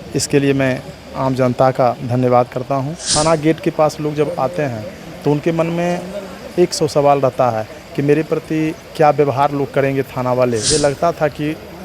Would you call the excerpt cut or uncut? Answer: cut